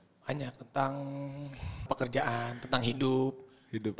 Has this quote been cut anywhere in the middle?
yes; 1 cut; at 1.8 s

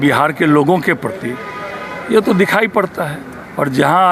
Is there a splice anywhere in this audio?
no; 0 cuts

